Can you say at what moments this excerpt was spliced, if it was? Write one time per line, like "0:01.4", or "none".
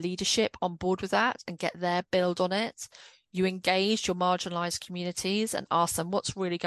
none